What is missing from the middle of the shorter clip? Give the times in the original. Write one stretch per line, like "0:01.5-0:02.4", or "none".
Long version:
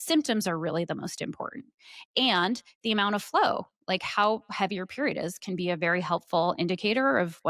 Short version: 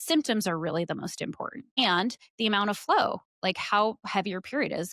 0:01.8-0:02.2